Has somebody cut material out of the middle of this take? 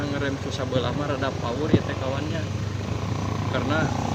no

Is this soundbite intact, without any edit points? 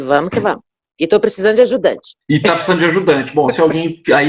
no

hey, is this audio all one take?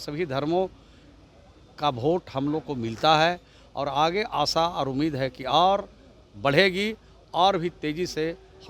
yes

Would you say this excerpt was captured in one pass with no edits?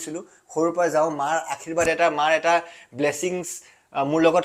yes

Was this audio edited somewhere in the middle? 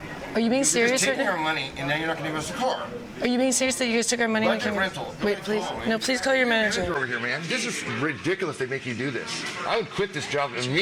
no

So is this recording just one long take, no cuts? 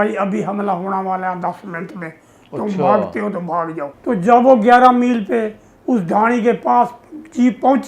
no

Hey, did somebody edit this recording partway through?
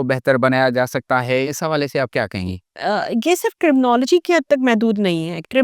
yes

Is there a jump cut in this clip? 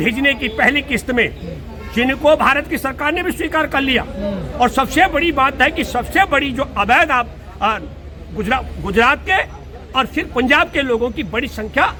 no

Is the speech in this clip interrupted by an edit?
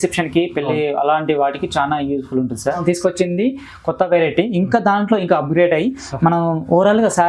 yes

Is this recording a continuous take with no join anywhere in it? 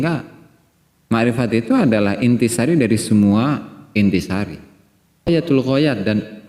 no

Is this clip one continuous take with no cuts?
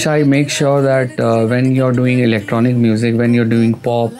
yes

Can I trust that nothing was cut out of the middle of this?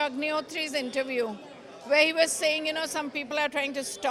yes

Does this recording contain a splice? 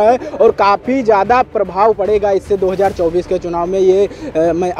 no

